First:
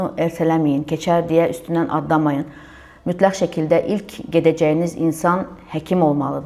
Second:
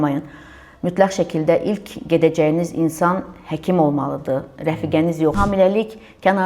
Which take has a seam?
second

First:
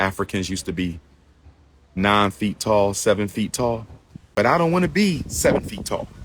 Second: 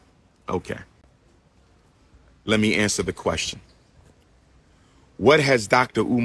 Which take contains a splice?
first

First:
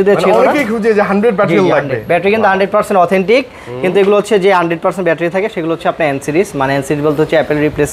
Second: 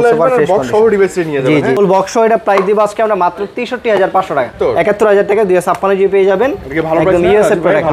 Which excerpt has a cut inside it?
second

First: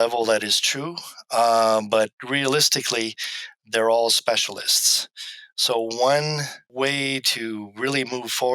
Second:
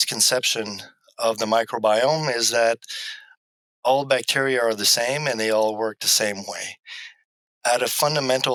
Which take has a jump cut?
first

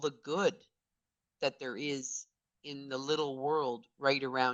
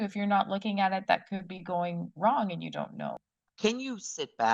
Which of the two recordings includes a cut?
second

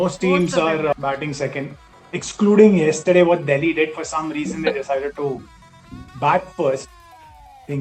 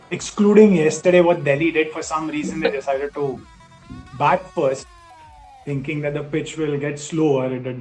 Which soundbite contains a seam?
first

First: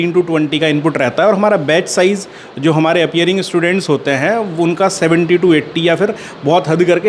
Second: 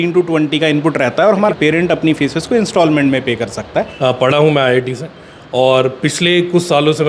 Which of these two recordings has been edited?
second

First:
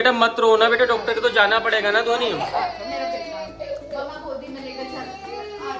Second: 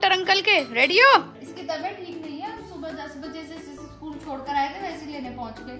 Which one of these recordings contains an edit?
second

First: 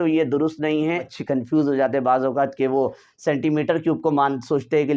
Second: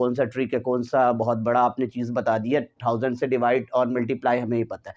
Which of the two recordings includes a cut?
first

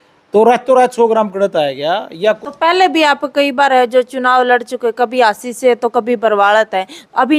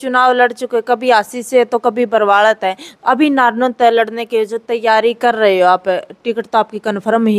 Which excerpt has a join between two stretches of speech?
first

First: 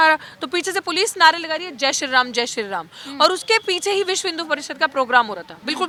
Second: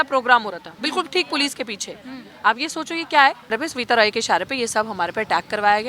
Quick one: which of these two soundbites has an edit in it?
second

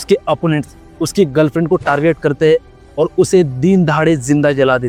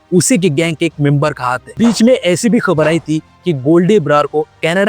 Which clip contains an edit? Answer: second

